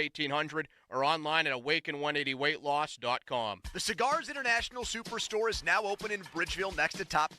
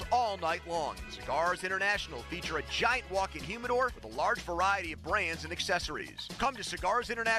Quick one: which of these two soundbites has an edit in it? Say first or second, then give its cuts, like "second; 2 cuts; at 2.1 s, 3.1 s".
first; 1 cut; at 3.7 s